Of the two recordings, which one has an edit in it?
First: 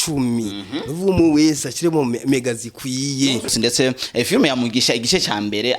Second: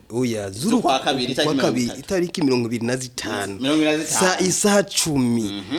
first; 1 cut; at 3.5 s

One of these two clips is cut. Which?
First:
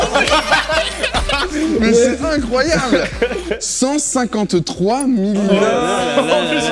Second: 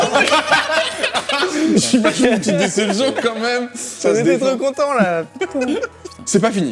second; 2 cuts; at 1.8 s, 4.0 s

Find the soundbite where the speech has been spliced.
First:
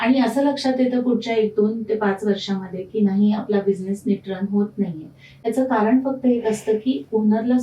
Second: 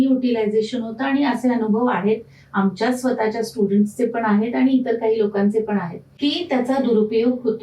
second; 1 cut; at 6.0 s

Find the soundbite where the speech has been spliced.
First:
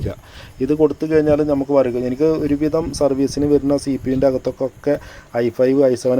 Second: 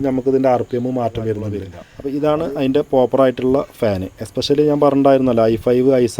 second; 1 cut; at 1.9 s

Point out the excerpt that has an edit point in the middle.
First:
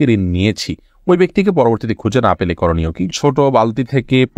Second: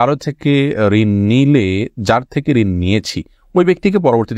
first; 1 cut; at 3.1 s

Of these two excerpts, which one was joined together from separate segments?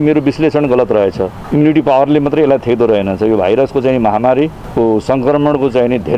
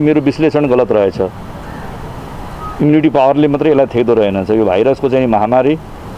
first; 2 cuts; at 1.4 s, 4.6 s

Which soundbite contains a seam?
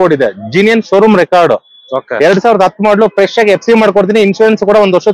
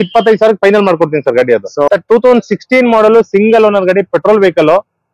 second; 1 cut; at 1.9 s

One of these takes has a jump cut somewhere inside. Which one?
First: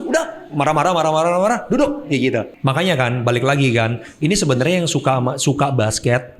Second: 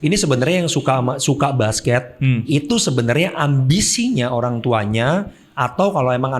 first; 1 cut; at 2.5 s

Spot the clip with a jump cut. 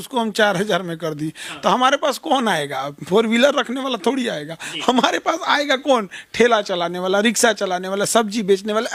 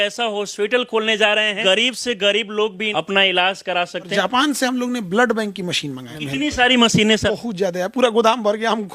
second; 5 cuts; at 1.6 s, 2.8 s, 4.1 s, 6.1 s, 7.2 s

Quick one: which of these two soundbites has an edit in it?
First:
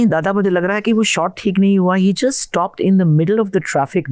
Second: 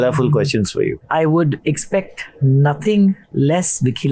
second; 1 cut; at 1.0 s

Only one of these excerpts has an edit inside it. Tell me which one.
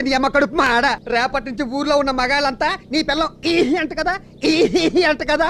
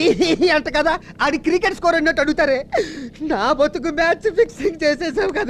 first; 1 cut; at 1.0 s

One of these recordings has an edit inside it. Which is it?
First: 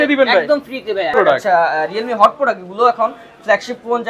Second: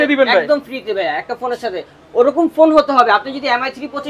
first; 1 cut; at 1.1 s

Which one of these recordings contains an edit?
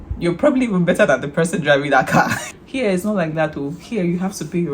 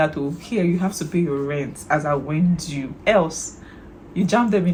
first; 1 cut; at 2.5 s

